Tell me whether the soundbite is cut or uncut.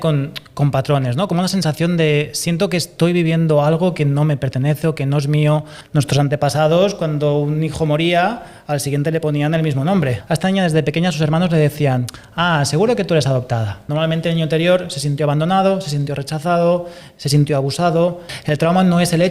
cut